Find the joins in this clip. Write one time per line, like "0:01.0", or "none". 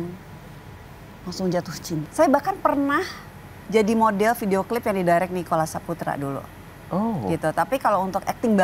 0:02.1